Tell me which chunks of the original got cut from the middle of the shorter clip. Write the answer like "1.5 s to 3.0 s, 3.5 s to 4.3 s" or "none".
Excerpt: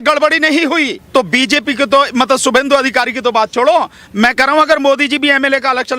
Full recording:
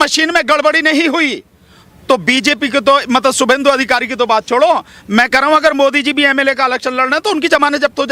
1.4 s to 1.9 s